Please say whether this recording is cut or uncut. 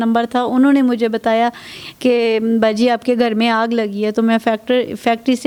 uncut